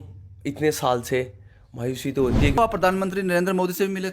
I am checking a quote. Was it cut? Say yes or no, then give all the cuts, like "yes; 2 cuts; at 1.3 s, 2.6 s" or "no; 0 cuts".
yes; 1 cut; at 2.6 s